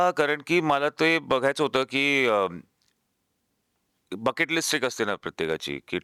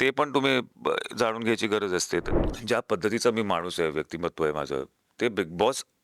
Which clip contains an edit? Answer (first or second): second